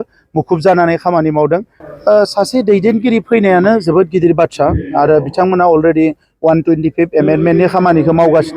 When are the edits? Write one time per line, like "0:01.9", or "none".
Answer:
0:01.8